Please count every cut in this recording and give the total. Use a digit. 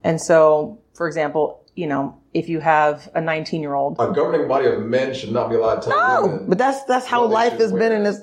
1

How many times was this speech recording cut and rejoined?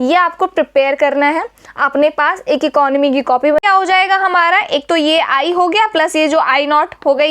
1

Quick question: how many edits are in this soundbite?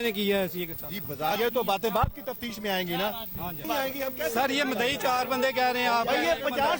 2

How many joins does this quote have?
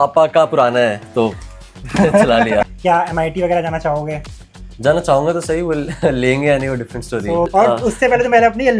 2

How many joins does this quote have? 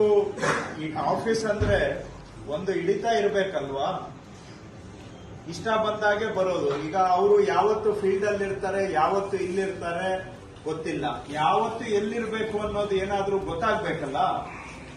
1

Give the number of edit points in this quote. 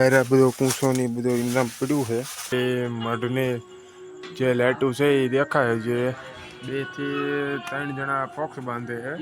1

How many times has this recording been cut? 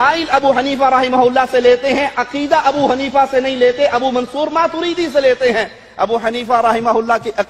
0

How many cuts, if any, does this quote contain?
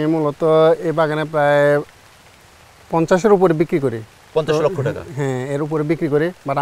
0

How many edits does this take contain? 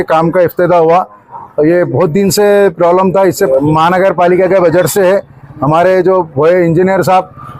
1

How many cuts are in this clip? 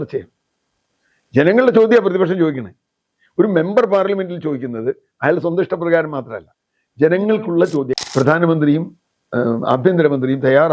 1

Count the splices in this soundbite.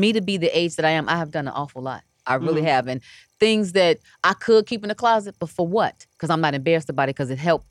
0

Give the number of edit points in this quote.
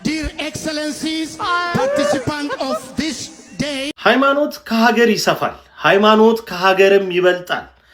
1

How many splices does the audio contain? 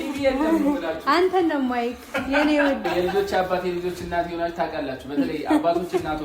1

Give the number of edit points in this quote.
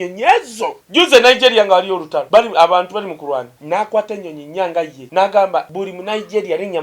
5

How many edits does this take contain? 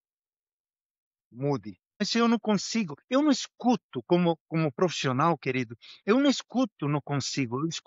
1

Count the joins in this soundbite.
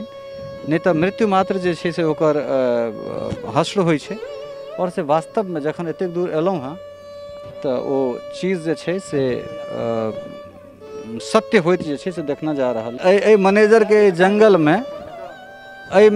1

